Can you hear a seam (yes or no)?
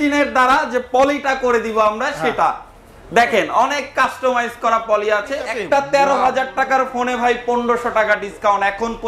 yes